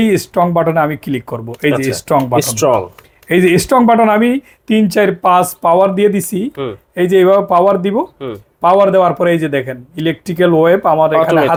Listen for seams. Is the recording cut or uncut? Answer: uncut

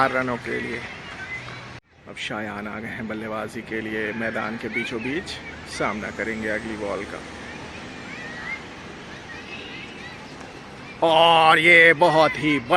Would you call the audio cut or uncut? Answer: cut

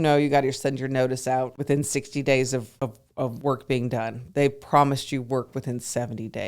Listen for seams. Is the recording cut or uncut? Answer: cut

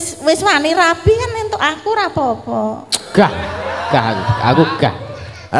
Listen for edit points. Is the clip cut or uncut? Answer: uncut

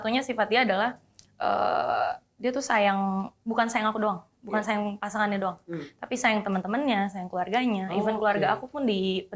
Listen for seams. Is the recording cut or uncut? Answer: uncut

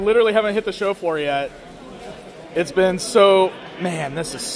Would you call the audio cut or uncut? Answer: uncut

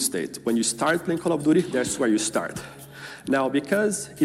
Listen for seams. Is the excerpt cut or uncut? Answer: uncut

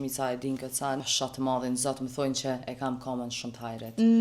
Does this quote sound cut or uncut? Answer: cut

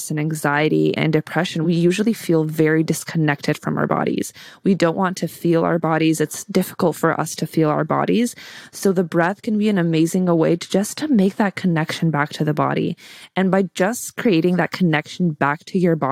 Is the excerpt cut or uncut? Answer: cut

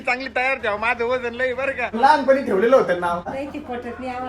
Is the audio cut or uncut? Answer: cut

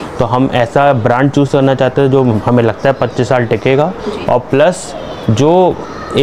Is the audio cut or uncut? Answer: uncut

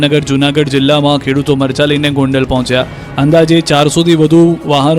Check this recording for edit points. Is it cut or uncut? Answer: uncut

